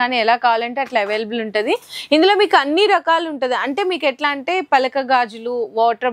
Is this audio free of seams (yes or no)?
yes